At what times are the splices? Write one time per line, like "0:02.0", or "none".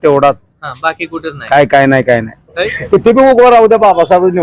0:02.7